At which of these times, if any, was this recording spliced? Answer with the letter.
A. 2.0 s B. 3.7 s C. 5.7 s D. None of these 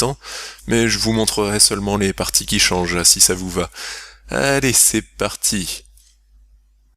C